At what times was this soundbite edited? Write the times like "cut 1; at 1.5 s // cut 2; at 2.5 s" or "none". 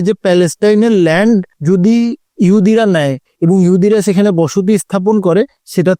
none